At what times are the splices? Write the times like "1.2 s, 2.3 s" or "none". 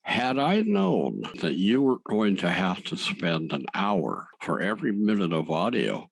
1.3 s